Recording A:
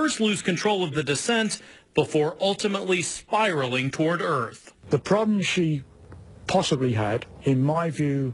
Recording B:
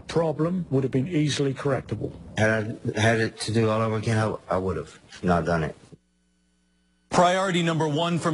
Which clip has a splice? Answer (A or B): A